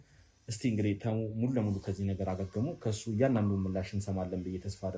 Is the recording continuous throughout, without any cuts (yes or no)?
yes